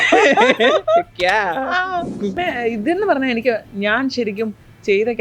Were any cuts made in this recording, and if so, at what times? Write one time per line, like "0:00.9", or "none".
0:02.4